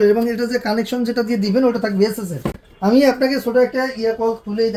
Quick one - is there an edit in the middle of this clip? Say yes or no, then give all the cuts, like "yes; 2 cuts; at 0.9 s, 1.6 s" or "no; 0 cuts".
no; 0 cuts